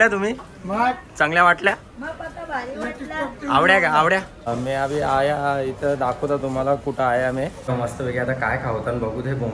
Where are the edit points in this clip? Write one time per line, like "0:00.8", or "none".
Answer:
0:04.5
0:07.7

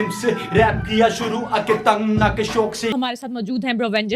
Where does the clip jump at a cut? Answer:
none

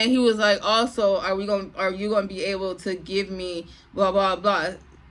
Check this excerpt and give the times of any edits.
none

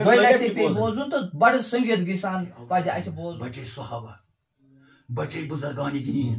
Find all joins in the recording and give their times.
0:03.2

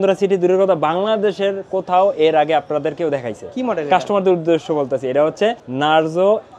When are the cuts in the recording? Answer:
0:05.7

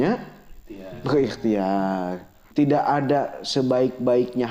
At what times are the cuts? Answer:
0:02.4

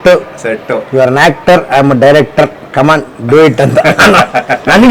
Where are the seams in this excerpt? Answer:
none

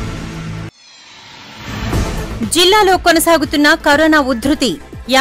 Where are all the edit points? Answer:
0:02.3

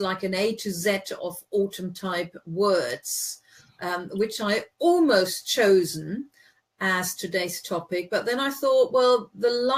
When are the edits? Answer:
0:04.5

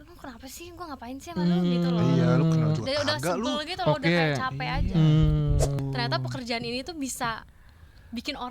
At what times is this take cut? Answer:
0:05.8

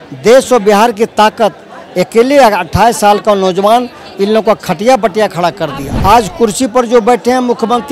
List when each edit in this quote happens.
0:05.9

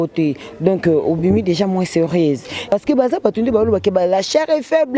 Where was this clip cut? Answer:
0:02.6

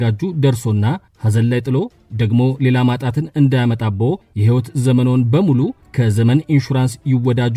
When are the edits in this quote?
0:01.1
0:04.3
0:05.9

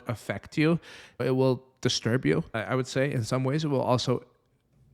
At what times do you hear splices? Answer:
0:01.2
0:02.5

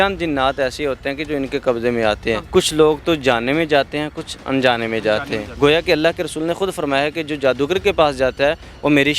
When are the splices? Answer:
0:02.5
0:05.6

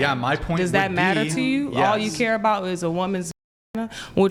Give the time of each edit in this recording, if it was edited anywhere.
none

